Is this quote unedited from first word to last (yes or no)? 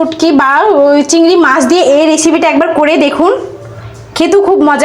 yes